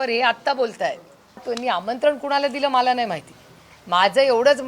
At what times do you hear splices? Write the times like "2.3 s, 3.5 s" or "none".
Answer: 1.4 s